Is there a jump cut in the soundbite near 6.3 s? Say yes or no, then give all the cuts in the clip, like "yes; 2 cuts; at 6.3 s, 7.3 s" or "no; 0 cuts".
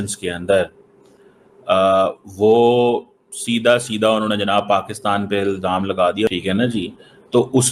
yes; 1 cut; at 6.3 s